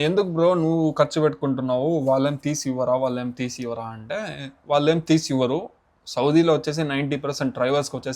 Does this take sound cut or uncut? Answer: uncut